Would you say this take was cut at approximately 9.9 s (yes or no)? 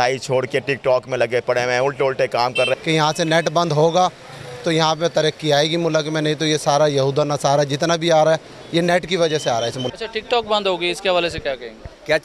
yes